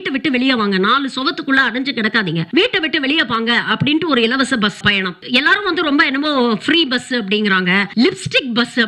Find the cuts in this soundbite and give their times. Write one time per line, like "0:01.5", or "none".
0:02.5
0:04.9
0:07.9